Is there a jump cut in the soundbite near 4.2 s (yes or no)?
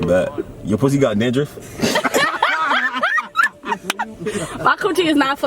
yes